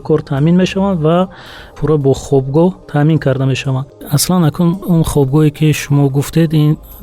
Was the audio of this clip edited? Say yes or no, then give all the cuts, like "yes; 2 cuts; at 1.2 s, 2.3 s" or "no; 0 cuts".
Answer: yes; 3 cuts; at 1.8 s, 4.1 s, 4.8 s